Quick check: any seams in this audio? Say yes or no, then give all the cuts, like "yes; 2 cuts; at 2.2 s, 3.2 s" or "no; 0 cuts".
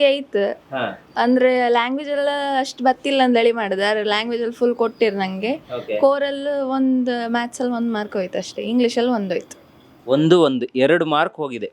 no; 0 cuts